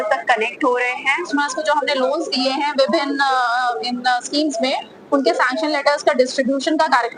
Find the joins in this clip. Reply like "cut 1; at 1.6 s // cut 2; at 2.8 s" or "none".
cut 1; at 1.3 s